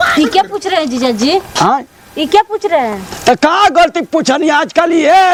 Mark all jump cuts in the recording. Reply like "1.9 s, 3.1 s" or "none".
none